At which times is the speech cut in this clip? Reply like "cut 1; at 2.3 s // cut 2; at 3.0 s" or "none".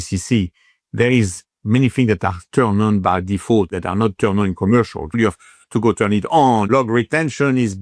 cut 1; at 3.7 s // cut 2; at 5.2 s // cut 3; at 6.7 s